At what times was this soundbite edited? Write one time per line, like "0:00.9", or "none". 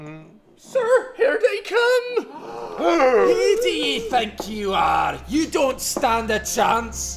0:03.9